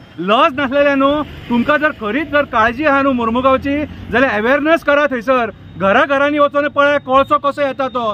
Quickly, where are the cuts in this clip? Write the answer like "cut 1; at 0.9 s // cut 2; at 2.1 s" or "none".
none